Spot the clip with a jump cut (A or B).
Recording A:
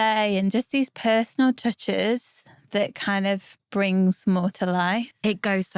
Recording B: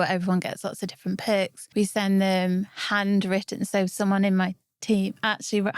B